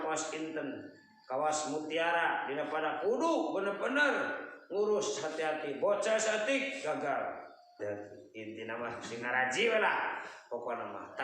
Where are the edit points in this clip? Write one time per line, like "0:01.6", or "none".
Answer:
0:07.8